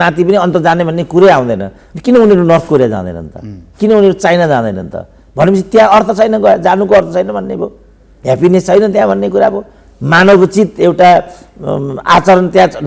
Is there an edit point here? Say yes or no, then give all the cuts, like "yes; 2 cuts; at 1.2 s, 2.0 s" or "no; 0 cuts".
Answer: no; 0 cuts